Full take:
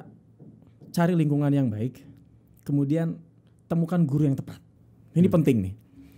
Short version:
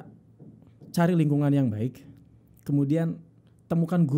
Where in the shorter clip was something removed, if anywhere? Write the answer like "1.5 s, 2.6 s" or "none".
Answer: none